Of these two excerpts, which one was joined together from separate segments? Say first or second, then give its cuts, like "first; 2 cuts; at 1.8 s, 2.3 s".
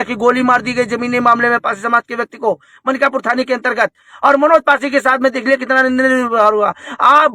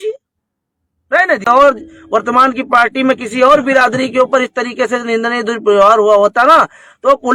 second; 1 cut; at 1.4 s